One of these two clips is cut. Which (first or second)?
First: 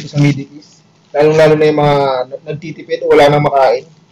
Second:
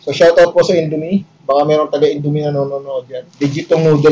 second